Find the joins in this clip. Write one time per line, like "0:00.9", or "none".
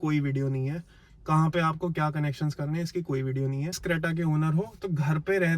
0:03.8

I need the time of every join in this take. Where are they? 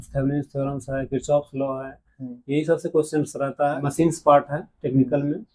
0:03.9

